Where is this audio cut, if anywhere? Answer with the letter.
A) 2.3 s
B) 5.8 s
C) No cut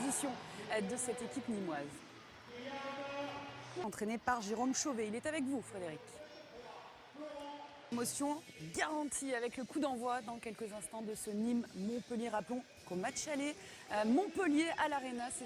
B